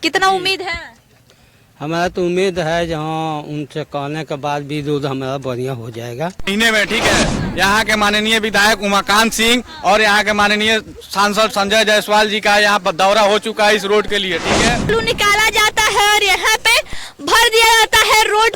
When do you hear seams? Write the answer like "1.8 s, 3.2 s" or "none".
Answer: 6.5 s, 14.9 s